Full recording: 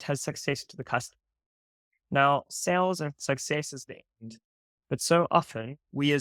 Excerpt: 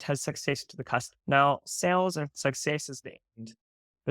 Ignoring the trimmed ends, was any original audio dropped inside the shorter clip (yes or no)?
yes